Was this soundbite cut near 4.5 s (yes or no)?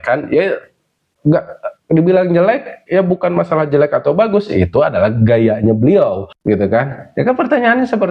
no